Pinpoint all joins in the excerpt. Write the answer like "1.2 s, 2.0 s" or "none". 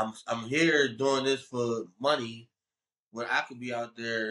none